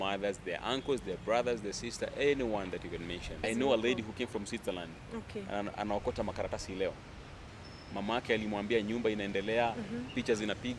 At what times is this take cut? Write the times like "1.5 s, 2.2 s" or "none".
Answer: 3.3 s